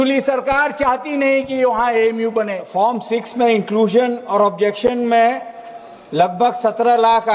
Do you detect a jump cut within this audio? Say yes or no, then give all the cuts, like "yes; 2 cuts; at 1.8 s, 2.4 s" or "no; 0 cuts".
yes; 1 cut; at 2.6 s